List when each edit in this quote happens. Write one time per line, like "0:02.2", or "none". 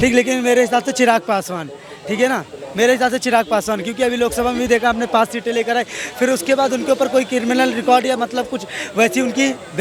none